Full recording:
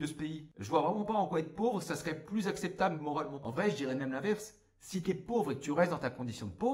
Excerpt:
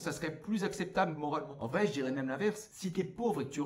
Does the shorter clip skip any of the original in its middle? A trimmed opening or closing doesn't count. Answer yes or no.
yes